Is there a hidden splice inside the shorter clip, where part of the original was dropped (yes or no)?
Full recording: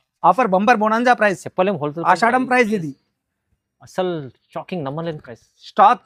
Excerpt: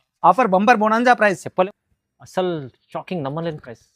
yes